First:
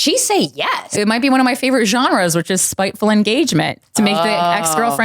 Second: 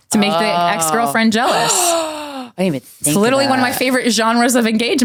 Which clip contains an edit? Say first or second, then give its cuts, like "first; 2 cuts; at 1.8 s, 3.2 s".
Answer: first; 1 cut; at 0.9 s